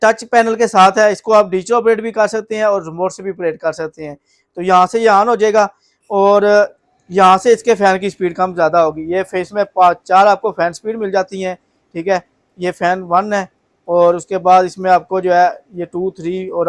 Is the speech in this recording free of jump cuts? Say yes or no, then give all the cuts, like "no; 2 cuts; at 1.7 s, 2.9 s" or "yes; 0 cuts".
yes; 0 cuts